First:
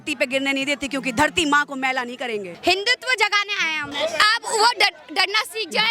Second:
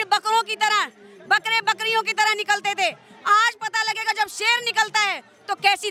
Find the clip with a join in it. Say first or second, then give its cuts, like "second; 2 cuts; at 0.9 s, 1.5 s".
first; 2 cuts; at 2.5 s, 3.9 s